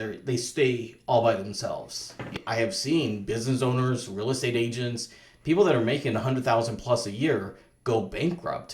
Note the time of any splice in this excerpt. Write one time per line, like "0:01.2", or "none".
0:02.4